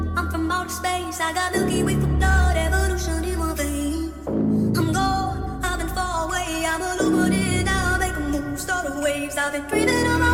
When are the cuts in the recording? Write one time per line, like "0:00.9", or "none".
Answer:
none